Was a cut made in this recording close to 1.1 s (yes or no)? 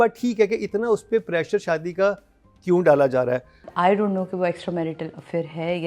no